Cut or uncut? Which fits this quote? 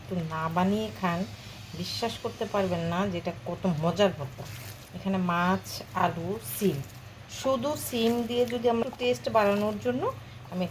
cut